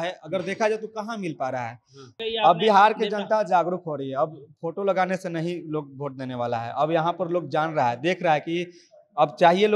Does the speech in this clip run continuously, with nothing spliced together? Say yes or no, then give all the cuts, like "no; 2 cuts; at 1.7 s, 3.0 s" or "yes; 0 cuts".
no; 1 cut; at 2.1 s